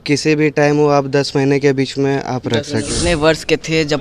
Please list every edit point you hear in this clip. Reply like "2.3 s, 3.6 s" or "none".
2.9 s